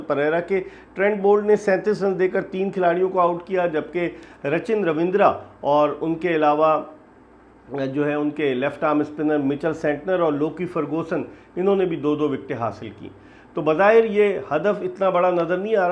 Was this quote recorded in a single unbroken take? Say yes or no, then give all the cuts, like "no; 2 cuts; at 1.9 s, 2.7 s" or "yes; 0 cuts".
yes; 0 cuts